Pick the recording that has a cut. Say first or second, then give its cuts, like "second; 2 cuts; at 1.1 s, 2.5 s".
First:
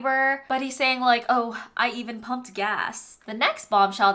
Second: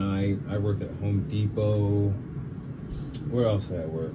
first; 1 cut; at 3.2 s